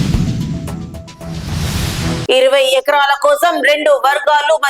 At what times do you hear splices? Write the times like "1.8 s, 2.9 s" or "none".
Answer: 2.2 s